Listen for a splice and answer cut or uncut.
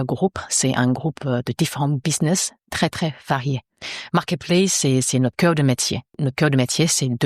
cut